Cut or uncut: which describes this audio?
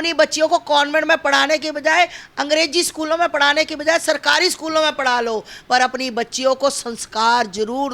uncut